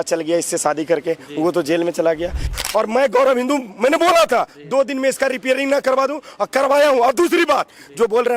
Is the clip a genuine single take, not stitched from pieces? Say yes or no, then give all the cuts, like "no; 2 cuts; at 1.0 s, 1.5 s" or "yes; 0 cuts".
no; 1 cut; at 2.6 s